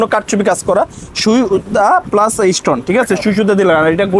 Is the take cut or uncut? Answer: uncut